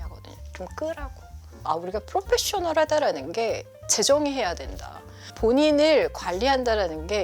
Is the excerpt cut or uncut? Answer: cut